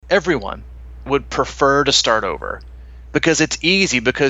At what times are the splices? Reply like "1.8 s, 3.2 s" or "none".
1.0 s